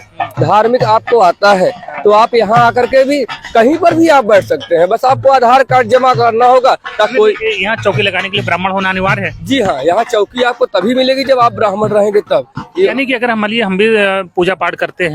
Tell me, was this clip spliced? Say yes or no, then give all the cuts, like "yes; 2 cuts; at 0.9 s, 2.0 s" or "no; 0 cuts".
yes; 2 cuts; at 7.1 s, 12.9 s